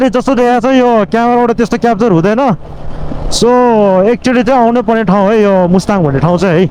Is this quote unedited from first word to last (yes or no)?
yes